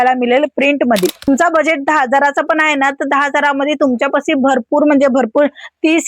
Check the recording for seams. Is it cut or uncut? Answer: cut